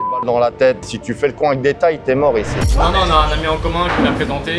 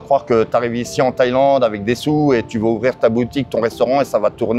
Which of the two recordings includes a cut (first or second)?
first